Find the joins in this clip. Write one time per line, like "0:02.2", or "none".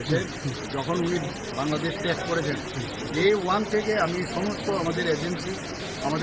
none

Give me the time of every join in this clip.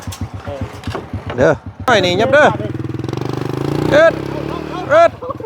0:01.9

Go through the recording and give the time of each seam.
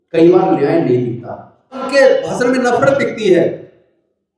0:01.8

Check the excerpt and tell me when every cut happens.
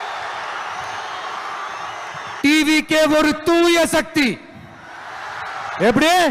none

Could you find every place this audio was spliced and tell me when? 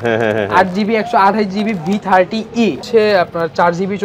0:02.8

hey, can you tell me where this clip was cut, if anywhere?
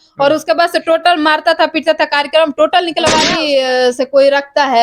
0:03.5

